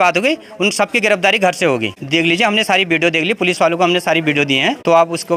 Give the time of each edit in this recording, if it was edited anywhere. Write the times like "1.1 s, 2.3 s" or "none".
none